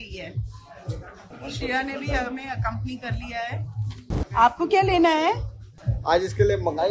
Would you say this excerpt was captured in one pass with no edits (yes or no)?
no